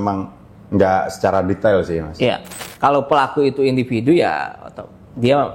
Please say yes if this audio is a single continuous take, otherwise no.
no